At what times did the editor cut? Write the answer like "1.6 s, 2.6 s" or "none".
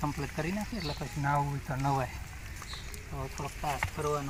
none